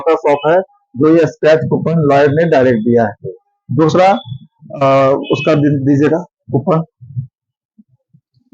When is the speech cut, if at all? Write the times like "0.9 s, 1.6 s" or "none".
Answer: none